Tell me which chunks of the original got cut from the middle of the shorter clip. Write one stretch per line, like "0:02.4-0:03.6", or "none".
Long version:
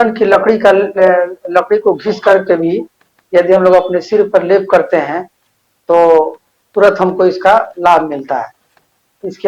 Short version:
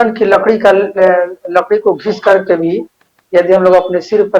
none